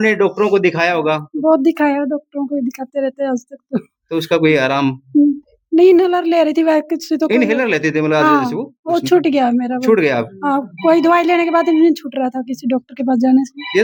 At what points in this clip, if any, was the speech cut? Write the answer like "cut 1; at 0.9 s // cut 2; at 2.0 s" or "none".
none